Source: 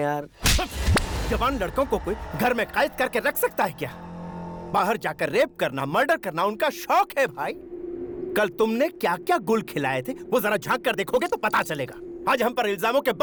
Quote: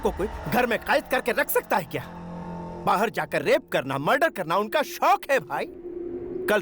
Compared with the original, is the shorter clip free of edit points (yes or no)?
yes